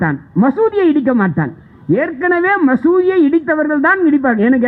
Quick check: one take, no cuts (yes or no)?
yes